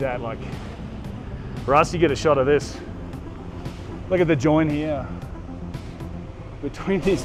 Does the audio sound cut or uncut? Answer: uncut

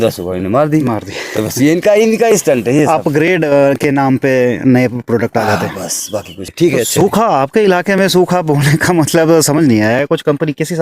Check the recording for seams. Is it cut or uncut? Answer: cut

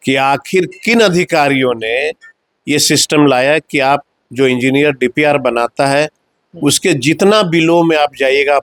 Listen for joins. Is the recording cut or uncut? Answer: uncut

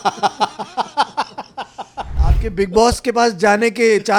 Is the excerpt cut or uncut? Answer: cut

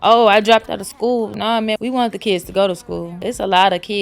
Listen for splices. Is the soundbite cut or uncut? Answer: cut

